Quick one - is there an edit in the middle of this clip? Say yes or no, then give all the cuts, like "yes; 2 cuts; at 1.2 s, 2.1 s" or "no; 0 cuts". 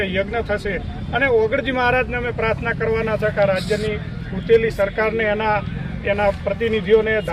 no; 0 cuts